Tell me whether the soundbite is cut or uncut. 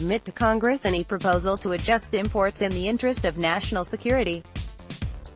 cut